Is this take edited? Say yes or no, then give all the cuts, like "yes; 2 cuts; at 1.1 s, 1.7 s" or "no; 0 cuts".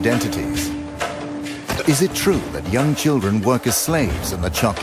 yes; 1 cut; at 2.6 s